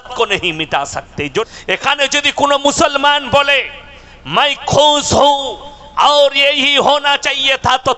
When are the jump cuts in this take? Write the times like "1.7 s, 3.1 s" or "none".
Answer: 1.4 s